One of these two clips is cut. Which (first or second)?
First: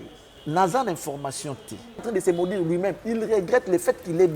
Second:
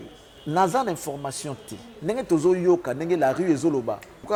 first